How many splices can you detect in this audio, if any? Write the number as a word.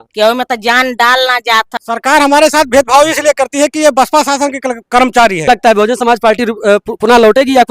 two